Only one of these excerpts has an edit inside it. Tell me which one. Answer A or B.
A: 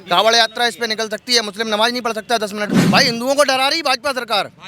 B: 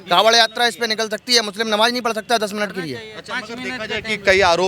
A